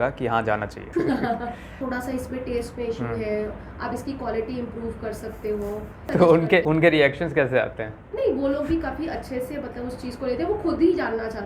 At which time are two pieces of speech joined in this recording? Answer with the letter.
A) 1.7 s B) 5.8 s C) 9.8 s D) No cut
A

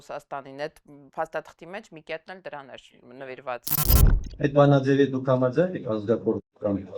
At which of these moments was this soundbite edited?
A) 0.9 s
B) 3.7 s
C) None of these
B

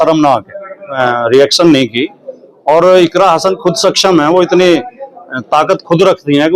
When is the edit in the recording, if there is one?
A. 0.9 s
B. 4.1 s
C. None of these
A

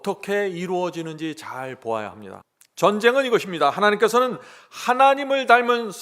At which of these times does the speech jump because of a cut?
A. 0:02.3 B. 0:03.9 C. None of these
A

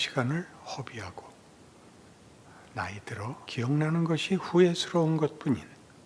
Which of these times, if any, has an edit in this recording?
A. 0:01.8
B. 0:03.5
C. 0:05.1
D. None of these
B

